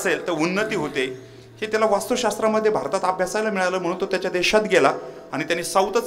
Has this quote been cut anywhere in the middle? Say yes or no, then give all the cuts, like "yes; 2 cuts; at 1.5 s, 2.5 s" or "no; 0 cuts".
no; 0 cuts